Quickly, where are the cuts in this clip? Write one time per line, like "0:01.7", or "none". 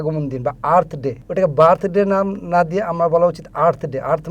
0:01.2